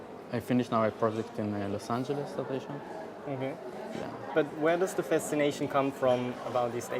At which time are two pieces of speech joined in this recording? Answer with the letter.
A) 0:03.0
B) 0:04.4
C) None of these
A